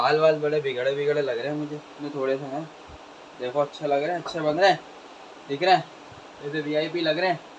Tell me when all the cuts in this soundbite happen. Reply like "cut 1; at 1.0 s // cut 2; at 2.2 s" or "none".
none